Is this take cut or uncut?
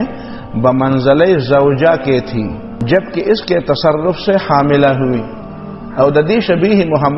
cut